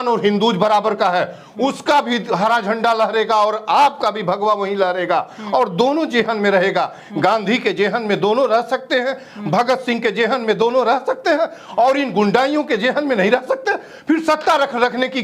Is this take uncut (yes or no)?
yes